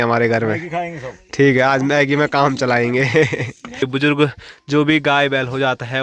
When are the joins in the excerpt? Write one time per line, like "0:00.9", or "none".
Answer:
0:03.9